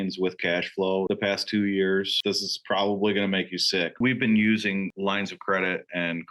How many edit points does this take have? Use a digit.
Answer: 3